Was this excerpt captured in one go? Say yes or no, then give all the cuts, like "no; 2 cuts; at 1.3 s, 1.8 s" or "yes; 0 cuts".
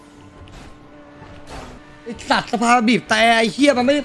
no; 1 cut; at 1.8 s